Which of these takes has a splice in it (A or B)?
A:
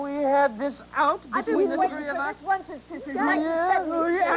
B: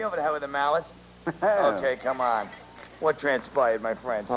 A